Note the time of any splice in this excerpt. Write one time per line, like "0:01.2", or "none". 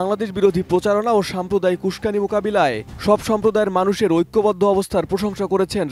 none